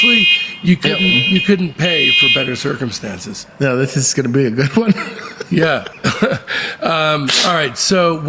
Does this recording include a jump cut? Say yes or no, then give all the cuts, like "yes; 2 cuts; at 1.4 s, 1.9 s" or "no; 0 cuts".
yes; 1 cut; at 3.4 s